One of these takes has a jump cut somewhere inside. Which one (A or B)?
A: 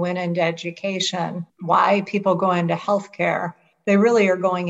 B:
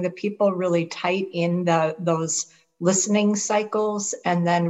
A